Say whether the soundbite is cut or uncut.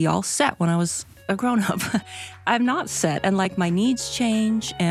uncut